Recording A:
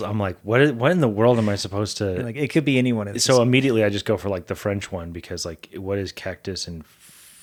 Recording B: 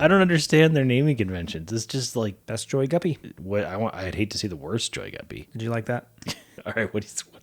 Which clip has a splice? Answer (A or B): B